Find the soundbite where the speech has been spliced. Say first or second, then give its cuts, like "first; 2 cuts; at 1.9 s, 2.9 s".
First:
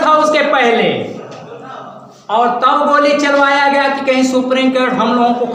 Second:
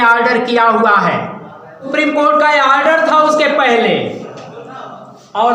second; 1 cut; at 1.9 s